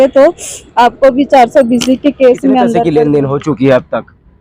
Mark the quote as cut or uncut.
cut